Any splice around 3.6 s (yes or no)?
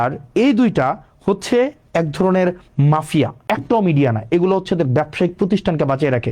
yes